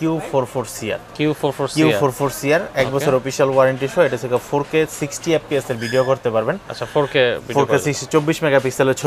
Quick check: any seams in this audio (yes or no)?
no